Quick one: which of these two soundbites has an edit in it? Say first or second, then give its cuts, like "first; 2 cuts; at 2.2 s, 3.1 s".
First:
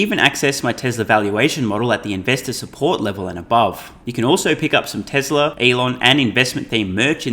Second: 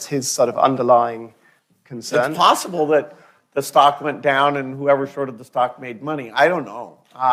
first; 2 cuts; at 4.0 s, 5.5 s